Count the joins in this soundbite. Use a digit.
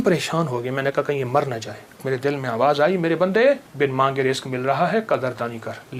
2